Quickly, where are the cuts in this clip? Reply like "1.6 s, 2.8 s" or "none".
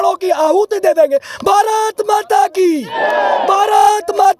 none